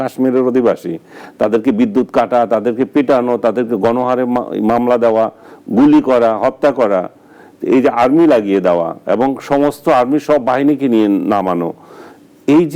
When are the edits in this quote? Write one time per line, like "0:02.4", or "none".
none